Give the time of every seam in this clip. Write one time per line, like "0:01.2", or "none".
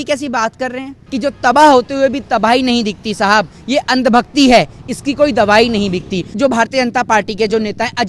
0:01.0
0:06.2